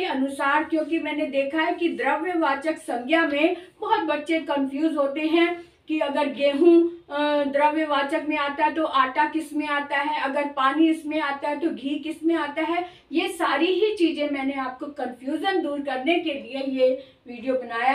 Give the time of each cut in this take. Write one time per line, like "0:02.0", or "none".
none